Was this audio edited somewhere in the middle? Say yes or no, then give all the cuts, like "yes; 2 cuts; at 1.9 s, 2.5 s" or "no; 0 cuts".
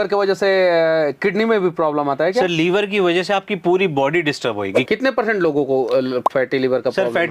yes; 1 cut; at 4.8 s